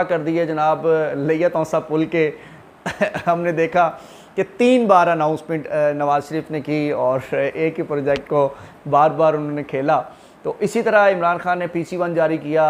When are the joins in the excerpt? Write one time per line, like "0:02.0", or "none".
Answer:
none